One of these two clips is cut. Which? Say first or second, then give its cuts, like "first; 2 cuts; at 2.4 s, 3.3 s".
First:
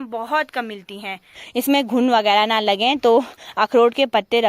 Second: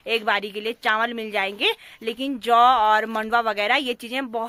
first; 1 cut; at 1.4 s